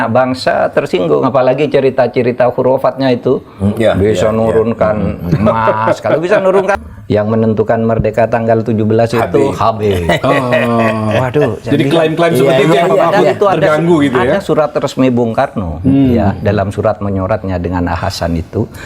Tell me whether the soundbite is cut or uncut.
cut